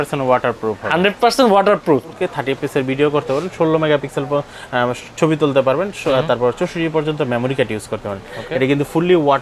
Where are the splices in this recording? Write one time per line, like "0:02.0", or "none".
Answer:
0:02.2